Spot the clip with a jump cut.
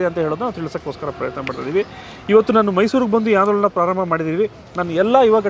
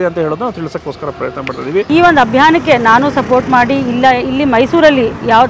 second; 1 cut; at 1.9 s

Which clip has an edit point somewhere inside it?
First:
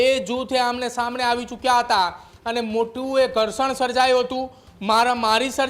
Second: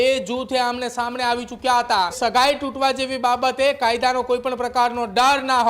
second; 1 cut; at 2.2 s

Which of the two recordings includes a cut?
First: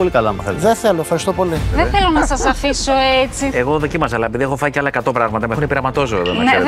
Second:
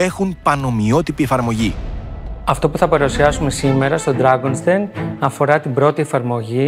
first; 1 cut; at 1.6 s

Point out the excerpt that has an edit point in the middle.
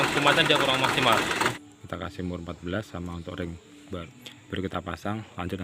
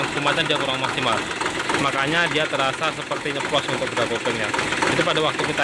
first; 2 cuts; at 1.5 s, 4.0 s

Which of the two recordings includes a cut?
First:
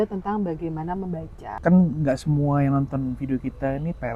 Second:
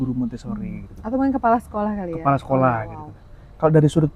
first; 1 cut; at 1.5 s

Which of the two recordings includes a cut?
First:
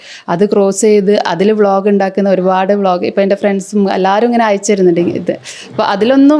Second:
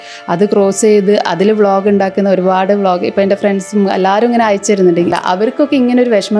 second; 1 cut; at 5.2 s

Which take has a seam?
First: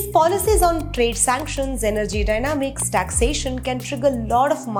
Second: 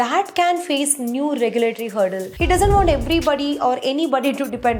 second; 1 cut; at 2.3 s

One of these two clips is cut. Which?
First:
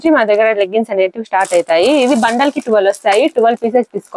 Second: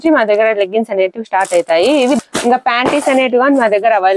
second; 1 cut; at 2.2 s

